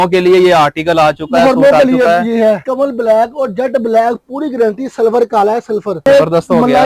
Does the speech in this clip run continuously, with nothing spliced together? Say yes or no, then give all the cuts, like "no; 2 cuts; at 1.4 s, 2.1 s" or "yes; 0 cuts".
no; 2 cuts; at 2.6 s, 6.1 s